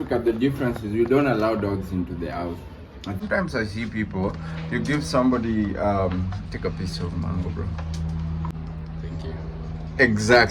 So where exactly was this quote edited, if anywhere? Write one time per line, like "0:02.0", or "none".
0:03.2
0:08.5